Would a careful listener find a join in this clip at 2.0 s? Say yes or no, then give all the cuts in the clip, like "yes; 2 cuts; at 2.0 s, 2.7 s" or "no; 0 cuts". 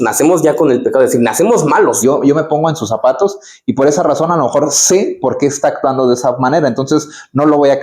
yes; 1 cut; at 2.0 s